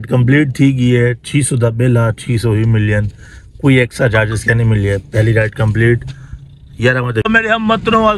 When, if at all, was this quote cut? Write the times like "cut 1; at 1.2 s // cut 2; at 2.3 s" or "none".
cut 1; at 7.2 s